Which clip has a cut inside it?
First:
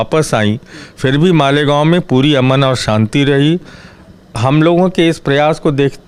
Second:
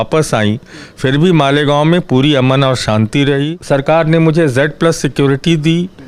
second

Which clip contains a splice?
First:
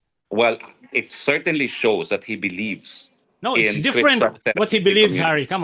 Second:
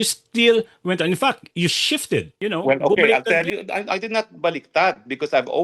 second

